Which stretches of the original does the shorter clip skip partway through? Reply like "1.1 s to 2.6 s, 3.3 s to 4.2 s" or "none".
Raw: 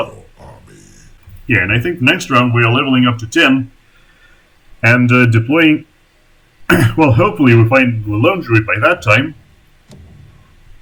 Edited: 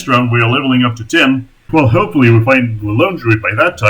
3.9 s to 6.9 s

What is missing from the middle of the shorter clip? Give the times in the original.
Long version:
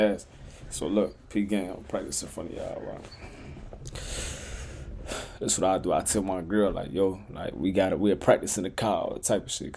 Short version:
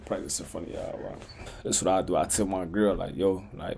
3.4 s to 5.3 s

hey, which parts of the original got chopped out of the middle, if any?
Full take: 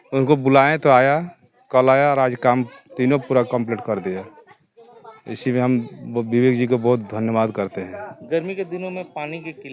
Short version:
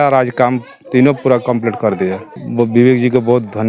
4.5 s to 6.0 s

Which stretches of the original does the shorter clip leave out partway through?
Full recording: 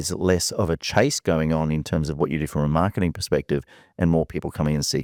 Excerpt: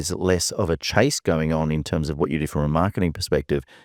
none

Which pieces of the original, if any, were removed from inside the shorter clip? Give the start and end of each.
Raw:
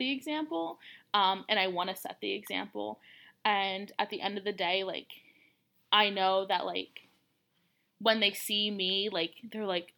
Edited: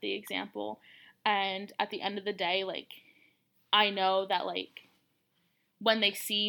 none

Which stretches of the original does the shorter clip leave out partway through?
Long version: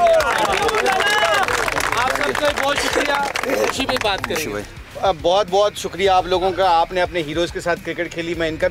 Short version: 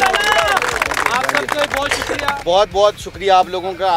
3.3 s to 5.2 s

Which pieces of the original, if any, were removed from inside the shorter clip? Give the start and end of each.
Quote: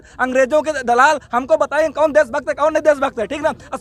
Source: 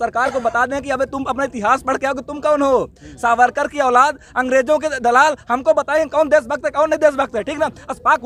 none

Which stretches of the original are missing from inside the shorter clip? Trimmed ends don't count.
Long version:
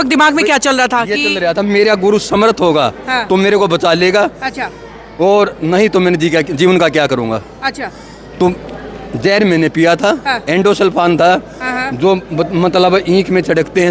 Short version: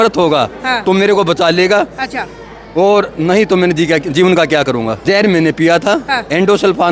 7.4 s to 9.1 s

